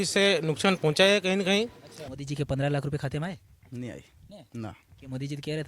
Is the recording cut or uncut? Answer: cut